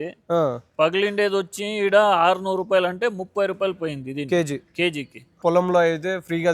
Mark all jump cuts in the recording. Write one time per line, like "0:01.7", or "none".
0:05.3